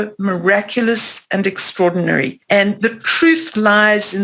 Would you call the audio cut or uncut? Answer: cut